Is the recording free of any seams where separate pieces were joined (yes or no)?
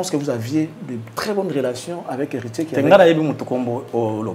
yes